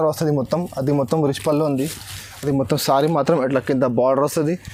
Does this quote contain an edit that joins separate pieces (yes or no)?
no